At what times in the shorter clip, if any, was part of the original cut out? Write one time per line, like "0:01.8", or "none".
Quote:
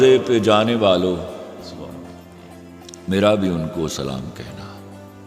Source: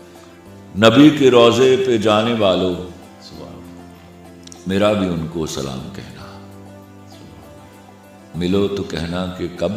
0:04.3